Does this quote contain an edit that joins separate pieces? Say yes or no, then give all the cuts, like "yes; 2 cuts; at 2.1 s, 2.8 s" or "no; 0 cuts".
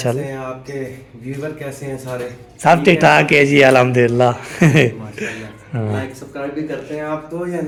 no; 0 cuts